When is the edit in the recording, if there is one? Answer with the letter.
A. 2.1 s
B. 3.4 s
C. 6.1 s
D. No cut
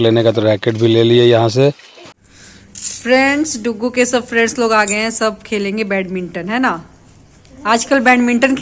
A